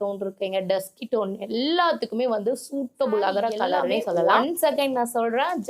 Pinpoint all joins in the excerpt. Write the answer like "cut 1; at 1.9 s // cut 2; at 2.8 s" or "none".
cut 1; at 4.4 s